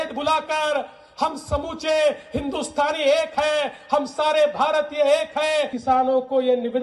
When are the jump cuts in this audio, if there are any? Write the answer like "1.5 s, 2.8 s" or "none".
5.7 s